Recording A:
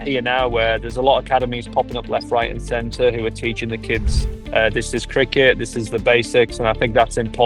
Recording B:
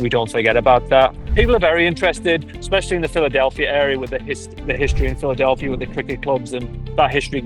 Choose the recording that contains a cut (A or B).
B